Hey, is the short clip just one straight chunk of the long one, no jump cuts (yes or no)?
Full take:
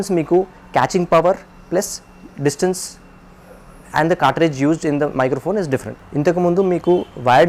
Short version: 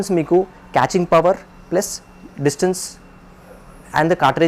yes